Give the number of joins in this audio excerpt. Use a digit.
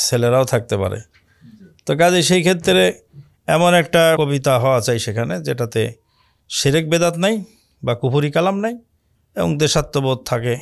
1